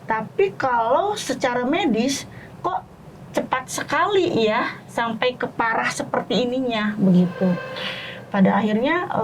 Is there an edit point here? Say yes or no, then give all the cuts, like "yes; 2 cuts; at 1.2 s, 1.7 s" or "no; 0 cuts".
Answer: no; 0 cuts